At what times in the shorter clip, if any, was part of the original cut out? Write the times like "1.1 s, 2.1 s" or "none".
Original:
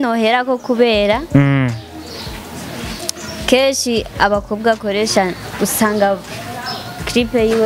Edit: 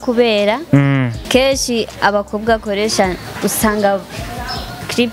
1.2 s